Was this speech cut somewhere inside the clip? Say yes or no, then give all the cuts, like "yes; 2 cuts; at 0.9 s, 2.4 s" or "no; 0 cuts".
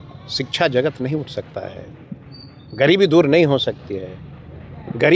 no; 0 cuts